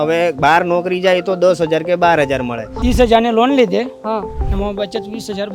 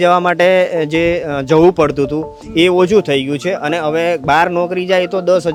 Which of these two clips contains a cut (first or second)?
first